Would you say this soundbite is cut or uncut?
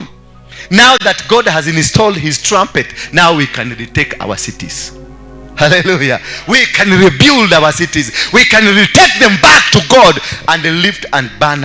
uncut